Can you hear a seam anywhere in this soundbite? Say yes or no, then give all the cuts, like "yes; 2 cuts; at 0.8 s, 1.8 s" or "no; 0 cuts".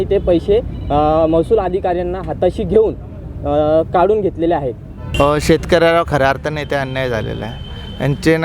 yes; 1 cut; at 5.0 s